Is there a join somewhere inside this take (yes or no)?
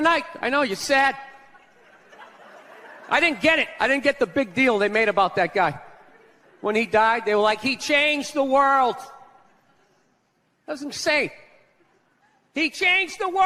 no